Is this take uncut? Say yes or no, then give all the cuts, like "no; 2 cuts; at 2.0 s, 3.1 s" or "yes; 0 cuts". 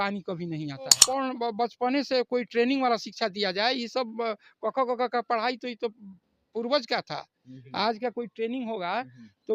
no; 1 cut; at 1.0 s